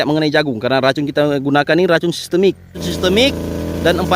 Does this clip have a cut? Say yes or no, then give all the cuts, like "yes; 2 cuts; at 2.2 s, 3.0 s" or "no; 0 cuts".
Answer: yes; 1 cut; at 2.8 s